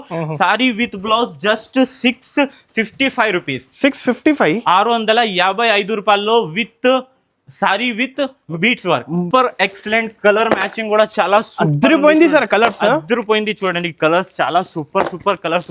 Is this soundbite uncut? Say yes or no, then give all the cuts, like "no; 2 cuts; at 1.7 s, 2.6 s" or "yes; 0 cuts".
no; 1 cut; at 9.3 s